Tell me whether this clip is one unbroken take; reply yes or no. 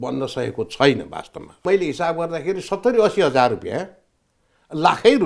no